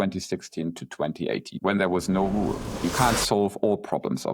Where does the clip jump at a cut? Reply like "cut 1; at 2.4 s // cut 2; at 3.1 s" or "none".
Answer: cut 1; at 1.5 s // cut 2; at 2.8 s